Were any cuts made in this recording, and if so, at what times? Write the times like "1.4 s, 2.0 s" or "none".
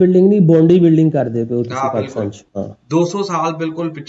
none